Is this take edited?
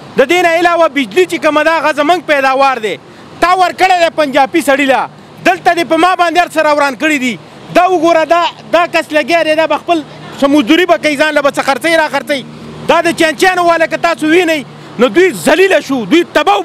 no; 0 cuts

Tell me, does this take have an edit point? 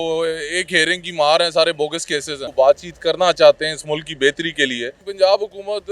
yes; 2 cuts; at 2.4 s, 5.0 s

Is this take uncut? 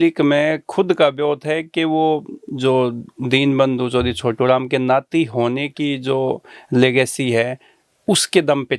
yes; 0 cuts

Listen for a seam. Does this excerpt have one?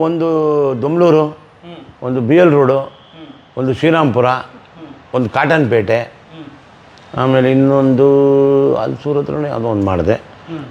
no; 0 cuts

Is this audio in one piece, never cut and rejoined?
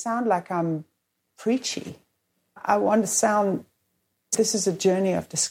no; 2 cuts; at 2.6 s, 4.3 s

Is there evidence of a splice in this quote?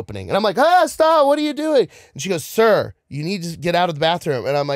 no; 0 cuts

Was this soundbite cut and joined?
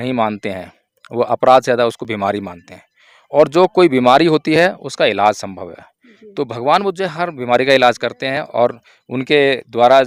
no; 0 cuts

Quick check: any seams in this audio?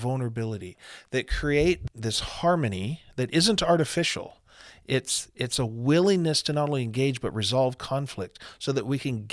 yes; 1 cut; at 1.8 s

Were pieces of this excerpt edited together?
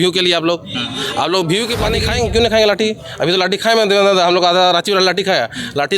yes; 1 cut; at 2.0 s

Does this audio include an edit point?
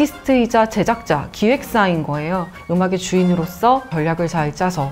yes; 1 cut; at 2.5 s

